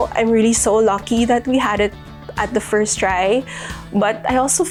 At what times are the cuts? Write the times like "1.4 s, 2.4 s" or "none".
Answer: none